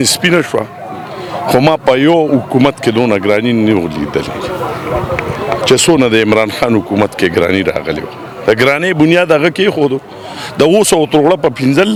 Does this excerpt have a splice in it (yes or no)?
no